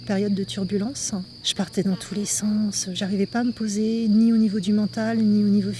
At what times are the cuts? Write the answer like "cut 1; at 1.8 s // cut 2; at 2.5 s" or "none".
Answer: cut 1; at 1.4 s // cut 2; at 2.9 s